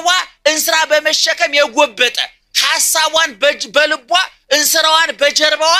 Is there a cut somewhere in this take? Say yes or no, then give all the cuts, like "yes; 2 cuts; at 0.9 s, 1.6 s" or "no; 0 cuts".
no; 0 cuts